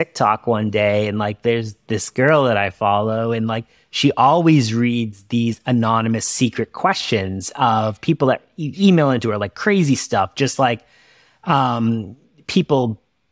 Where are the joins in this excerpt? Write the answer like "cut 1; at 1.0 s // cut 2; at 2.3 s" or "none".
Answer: none